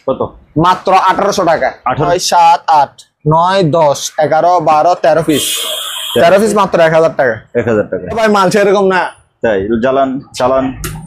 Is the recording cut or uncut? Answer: cut